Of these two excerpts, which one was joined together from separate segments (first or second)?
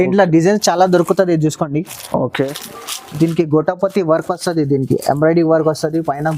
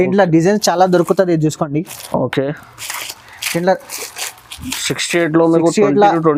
first